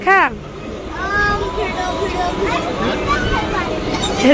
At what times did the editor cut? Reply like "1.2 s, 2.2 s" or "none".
none